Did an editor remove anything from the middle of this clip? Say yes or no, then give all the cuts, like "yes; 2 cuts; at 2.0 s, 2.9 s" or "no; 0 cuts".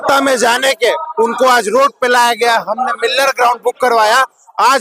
no; 0 cuts